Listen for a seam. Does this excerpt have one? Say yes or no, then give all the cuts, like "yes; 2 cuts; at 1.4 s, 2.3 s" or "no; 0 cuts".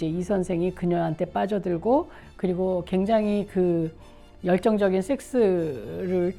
no; 0 cuts